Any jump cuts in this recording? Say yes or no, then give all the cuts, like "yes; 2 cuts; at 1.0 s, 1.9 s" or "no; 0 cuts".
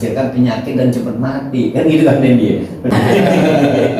yes; 1 cut; at 2.9 s